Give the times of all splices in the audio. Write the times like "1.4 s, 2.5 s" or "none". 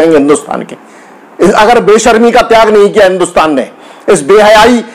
none